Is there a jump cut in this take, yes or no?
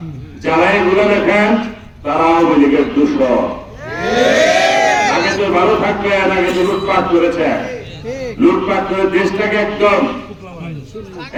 no